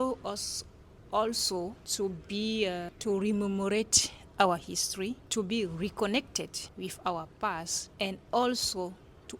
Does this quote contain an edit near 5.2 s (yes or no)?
yes